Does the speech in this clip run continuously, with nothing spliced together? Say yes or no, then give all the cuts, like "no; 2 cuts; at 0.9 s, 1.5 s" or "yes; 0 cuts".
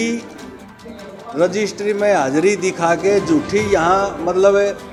yes; 0 cuts